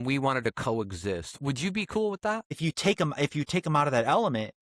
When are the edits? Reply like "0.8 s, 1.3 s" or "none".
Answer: 2.6 s